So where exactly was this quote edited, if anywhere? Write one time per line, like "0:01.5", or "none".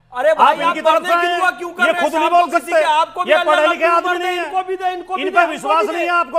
none